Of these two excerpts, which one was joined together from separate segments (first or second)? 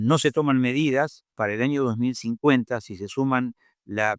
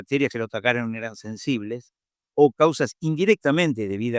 first